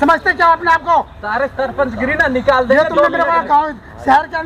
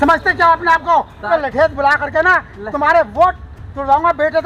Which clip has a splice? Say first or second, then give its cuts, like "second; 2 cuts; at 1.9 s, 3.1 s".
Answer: second; 1 cut; at 1.3 s